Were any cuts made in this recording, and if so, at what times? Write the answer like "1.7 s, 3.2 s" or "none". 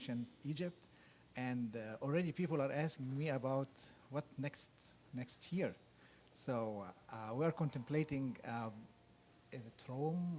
2.8 s